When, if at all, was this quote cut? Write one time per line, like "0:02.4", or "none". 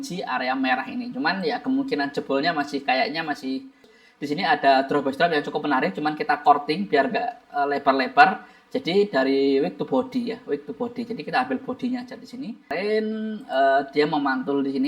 0:04.0
0:12.7